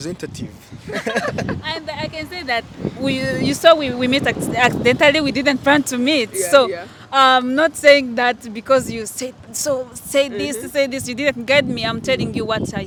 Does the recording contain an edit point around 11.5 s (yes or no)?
no